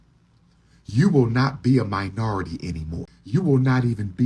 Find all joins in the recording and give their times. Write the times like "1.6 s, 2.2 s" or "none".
3.1 s